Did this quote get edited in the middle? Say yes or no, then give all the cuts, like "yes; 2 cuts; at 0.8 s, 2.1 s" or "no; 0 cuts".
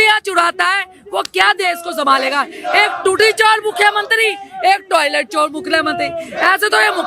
no; 0 cuts